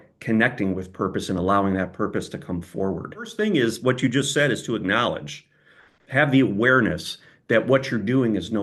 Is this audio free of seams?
no; 1 cut; at 3.3 s

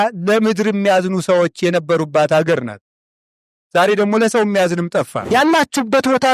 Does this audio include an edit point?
yes; 1 cut; at 5.2 s

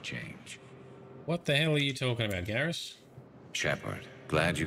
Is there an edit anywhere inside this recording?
no; 0 cuts

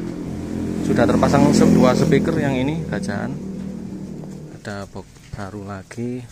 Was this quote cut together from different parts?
yes; 1 cut; at 4.6 s

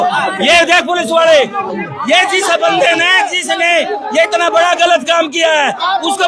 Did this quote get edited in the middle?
no; 0 cuts

